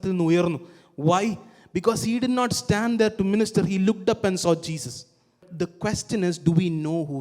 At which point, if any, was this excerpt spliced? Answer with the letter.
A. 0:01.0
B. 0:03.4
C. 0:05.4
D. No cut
C